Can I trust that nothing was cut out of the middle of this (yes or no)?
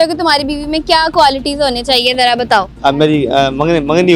no